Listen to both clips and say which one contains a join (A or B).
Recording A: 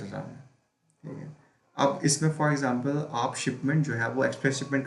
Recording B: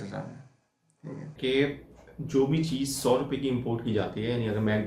B